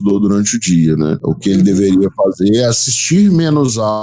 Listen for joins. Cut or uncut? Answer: cut